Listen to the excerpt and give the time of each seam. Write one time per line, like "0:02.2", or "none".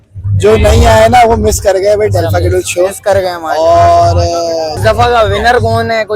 0:04.8